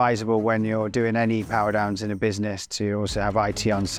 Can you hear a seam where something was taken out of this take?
no; 0 cuts

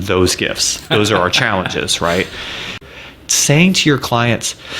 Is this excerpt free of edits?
no; 1 cut; at 2.8 s

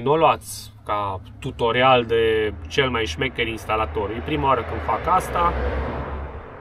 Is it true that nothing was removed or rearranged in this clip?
yes; 0 cuts

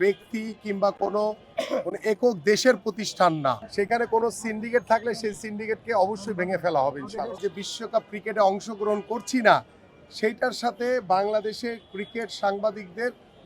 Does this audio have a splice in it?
yes; 2 cuts; at 3.6 s, 7.4 s

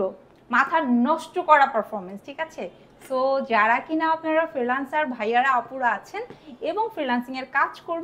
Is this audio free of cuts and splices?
yes; 0 cuts

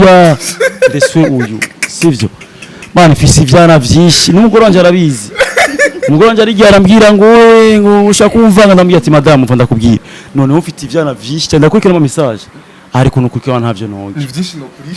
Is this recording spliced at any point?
no; 0 cuts

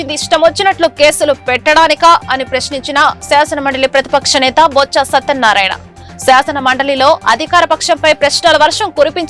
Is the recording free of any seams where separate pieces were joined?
yes; 0 cuts

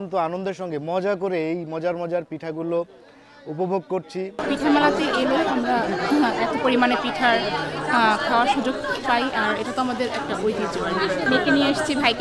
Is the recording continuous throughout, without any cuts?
yes; 0 cuts

